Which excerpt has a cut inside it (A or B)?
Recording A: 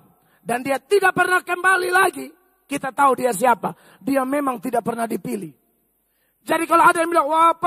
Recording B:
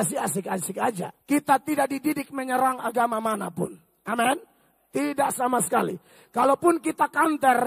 B